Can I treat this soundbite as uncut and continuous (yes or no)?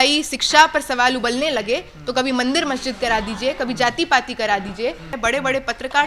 no